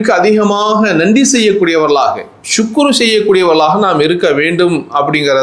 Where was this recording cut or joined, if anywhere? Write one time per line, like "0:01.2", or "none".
none

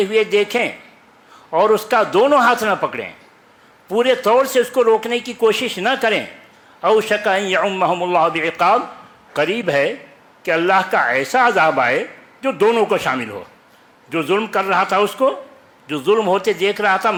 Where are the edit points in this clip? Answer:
none

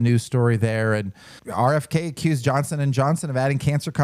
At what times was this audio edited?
0:01.4

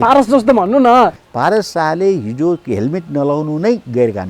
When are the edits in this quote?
0:01.2

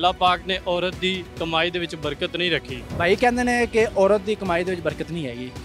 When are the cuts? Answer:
0:01.3
0:02.8

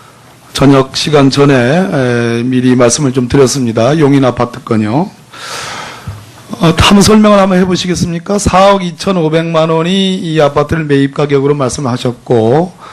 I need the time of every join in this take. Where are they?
none

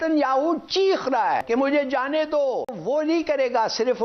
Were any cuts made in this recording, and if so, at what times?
0:01.4
0:02.8

